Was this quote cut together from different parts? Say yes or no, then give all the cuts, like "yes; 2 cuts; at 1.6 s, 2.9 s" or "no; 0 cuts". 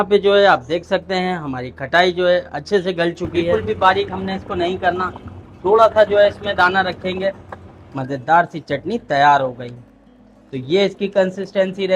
yes; 2 cuts; at 3.5 s, 7.5 s